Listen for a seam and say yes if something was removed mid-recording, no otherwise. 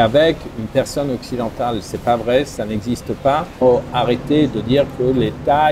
yes